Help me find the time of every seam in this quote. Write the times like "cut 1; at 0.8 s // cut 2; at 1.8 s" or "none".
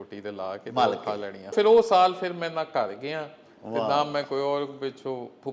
cut 1; at 1.5 s